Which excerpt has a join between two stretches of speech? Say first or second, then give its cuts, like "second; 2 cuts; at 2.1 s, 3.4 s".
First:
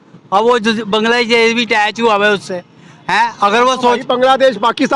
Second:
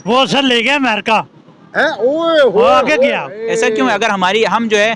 second; 1 cut; at 3.3 s